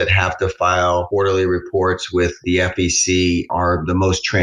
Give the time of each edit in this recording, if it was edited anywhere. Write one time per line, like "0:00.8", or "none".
0:01.1
0:03.5